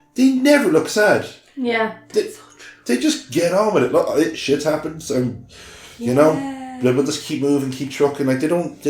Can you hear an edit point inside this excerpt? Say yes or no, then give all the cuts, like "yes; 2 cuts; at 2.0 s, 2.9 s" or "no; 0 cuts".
no; 0 cuts